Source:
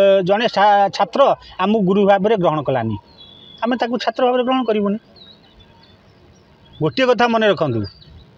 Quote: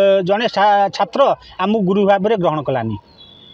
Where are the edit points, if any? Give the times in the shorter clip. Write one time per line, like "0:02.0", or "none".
none